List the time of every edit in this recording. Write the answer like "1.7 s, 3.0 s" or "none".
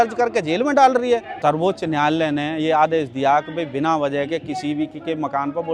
1.3 s